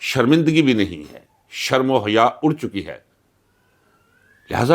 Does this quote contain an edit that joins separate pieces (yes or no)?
no